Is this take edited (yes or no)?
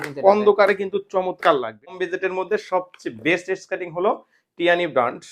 yes